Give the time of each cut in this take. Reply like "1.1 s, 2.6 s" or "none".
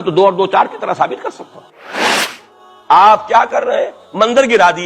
2.4 s

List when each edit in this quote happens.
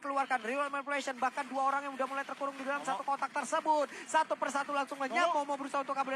none

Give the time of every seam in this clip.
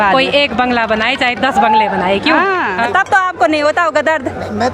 2.8 s

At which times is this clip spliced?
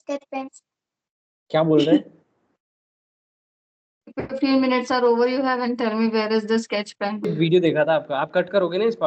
7.3 s

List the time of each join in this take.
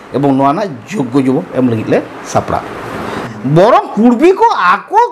3.1 s

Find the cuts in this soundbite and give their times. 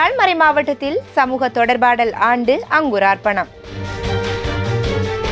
3.8 s

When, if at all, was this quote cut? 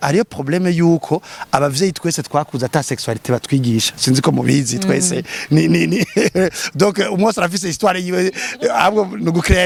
none

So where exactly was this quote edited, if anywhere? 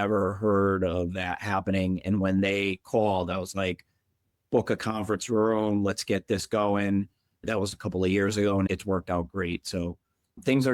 7.4 s

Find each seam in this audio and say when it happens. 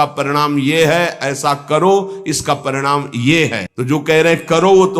3.7 s

